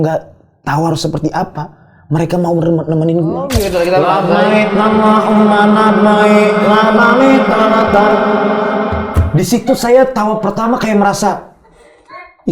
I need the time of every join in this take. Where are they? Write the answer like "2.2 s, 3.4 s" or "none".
3.6 s

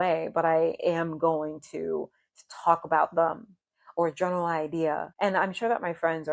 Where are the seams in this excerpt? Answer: 5.1 s

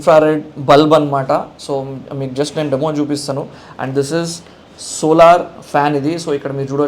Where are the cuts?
none

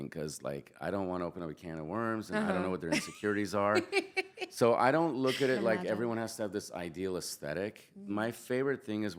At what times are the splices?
none

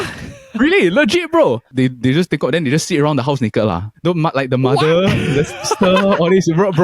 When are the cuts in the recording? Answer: 1.7 s, 3.9 s

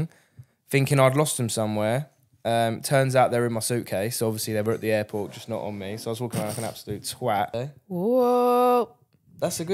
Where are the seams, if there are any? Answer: 7.5 s

